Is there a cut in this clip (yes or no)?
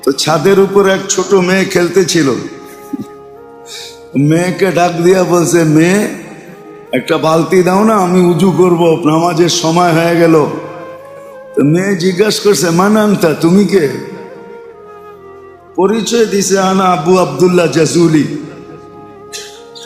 no